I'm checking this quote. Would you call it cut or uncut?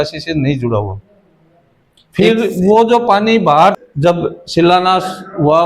cut